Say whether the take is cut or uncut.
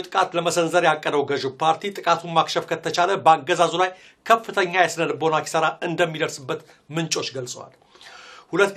cut